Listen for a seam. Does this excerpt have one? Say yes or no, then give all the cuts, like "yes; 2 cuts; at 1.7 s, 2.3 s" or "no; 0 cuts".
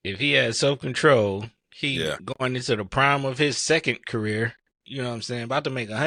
no; 0 cuts